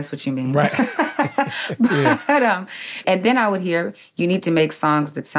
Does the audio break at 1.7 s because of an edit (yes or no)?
no